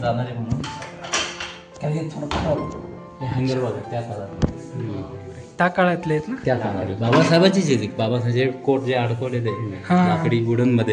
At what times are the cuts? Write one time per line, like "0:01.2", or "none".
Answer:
none